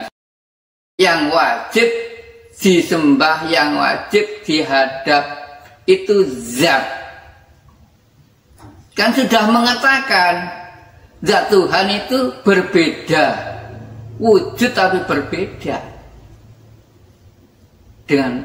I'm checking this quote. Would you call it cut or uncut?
uncut